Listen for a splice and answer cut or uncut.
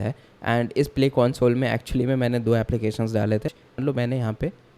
cut